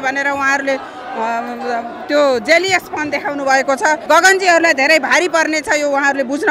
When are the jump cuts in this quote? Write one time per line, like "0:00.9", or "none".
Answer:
0:04.0